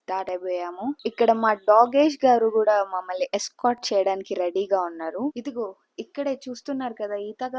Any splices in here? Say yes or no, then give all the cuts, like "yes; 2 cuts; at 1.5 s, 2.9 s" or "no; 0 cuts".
no; 0 cuts